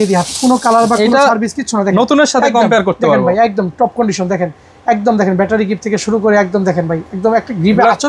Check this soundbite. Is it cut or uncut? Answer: uncut